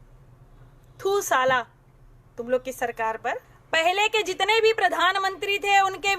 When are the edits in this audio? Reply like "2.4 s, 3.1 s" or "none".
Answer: 3.5 s